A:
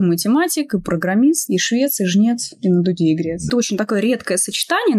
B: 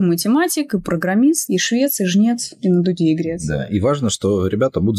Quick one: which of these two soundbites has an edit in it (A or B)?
A